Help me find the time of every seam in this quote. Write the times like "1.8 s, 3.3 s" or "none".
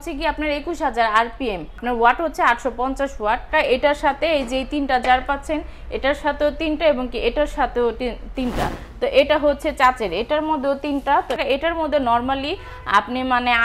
1.8 s, 3.5 s, 8.7 s, 11.4 s